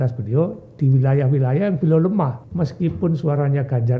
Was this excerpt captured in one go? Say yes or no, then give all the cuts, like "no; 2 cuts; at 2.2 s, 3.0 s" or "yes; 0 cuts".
no; 1 cut; at 2.4 s